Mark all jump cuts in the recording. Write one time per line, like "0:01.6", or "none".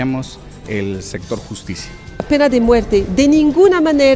0:02.3